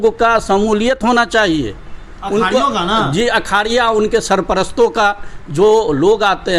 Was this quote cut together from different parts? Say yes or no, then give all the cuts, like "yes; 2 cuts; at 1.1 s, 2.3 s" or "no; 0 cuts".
no; 0 cuts